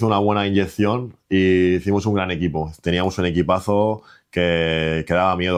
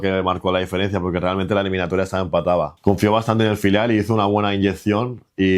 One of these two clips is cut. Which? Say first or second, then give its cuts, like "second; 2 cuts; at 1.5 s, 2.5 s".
second; 1 cut; at 2.7 s